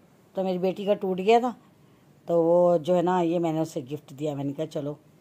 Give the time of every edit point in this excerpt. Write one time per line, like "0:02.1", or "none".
none